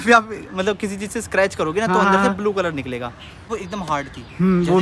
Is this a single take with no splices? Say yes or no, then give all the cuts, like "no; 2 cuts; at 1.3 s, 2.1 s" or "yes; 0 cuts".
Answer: no; 1 cut; at 3.5 s